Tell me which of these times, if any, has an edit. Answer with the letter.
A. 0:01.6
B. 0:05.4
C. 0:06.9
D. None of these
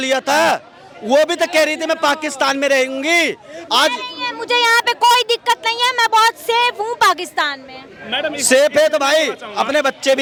D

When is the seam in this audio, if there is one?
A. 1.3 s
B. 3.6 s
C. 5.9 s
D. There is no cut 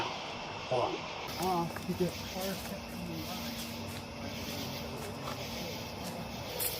A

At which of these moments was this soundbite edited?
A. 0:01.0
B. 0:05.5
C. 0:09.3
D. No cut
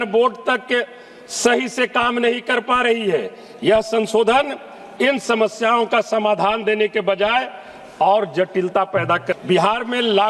C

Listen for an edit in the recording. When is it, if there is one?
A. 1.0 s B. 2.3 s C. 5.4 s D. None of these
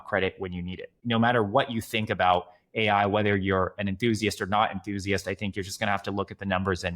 A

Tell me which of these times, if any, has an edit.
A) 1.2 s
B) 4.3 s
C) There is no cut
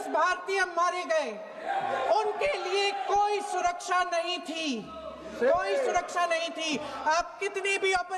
B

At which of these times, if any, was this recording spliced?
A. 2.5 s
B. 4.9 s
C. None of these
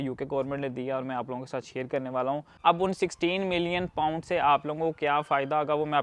A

